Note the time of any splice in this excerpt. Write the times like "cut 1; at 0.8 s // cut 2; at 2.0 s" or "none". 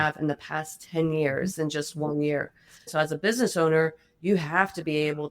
cut 1; at 2.9 s

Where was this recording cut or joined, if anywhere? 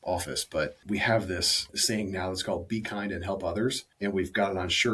cut 1; at 0.8 s // cut 2; at 1.7 s // cut 3; at 3.9 s

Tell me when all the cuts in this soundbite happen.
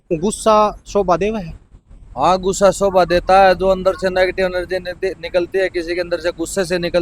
none

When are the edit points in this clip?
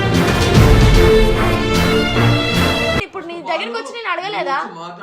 cut 1; at 3.0 s

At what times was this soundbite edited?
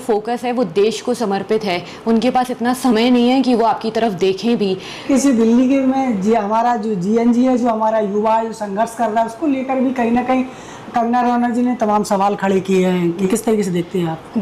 none

